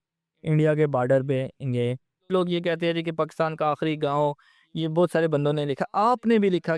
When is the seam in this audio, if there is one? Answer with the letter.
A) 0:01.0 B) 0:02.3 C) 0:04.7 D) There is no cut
B